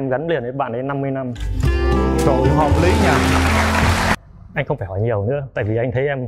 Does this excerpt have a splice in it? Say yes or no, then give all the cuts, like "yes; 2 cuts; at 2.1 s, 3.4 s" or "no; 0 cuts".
yes; 1 cut; at 4.2 s